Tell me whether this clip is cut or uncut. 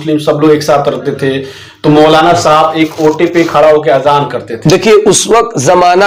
uncut